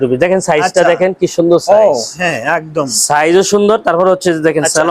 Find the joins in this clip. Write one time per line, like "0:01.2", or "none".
none

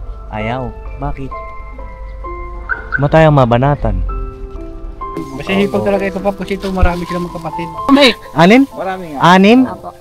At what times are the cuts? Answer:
0:05.2
0:07.9

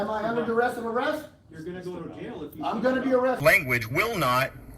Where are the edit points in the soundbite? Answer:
0:03.4

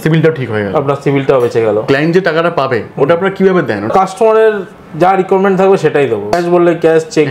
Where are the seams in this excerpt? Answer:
0:01.8
0:03.9
0:06.3

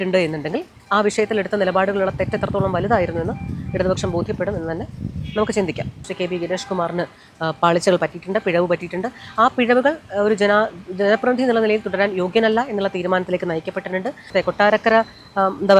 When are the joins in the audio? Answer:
0:06.1
0:14.3

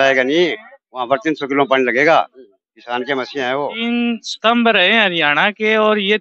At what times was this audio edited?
0:03.7

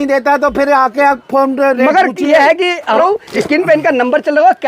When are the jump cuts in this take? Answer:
0:03.0

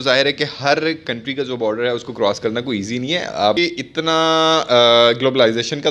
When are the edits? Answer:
0:03.6

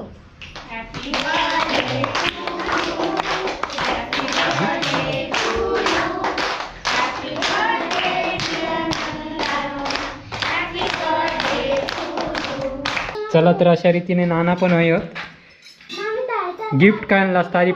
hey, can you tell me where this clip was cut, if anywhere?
0:13.2

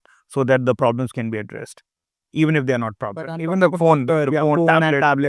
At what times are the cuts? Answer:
0:03.4

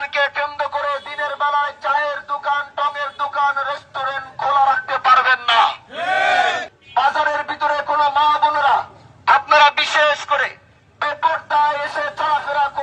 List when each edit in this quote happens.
0:06.7

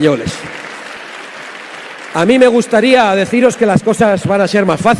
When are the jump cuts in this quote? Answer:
0:01.0

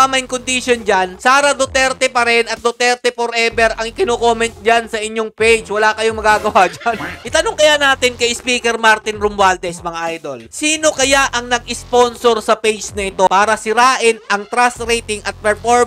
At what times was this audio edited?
0:07.2
0:13.3

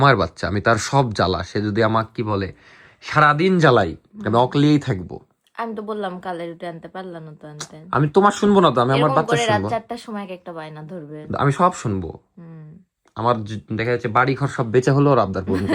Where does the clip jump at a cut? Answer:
none

